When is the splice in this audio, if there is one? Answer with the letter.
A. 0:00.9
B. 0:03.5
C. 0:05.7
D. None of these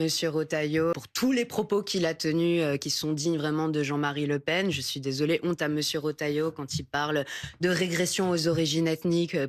A